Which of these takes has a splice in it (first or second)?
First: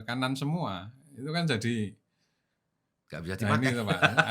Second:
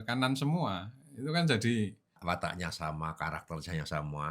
second